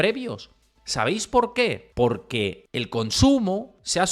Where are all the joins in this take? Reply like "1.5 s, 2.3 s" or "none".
1.9 s, 2.6 s